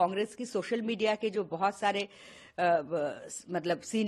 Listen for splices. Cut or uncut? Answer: uncut